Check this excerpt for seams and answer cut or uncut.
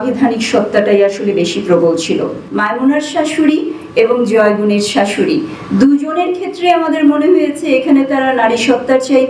cut